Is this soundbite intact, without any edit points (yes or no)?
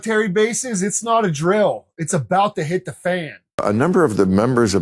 no